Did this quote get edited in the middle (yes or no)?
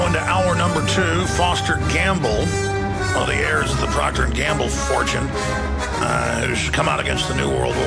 yes